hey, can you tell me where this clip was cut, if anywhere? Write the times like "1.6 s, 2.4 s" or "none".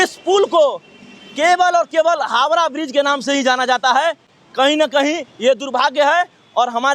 none